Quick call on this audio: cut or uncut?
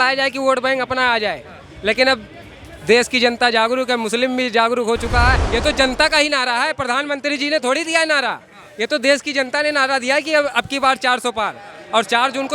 cut